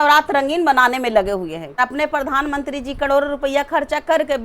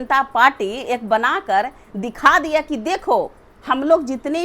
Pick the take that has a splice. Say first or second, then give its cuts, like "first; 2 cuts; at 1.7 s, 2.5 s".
first; 1 cut; at 1.8 s